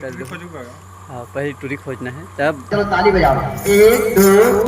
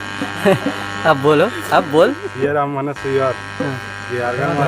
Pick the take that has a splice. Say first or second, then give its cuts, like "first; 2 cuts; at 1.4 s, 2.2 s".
first; 1 cut; at 2.6 s